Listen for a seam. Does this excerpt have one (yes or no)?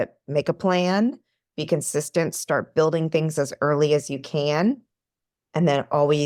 no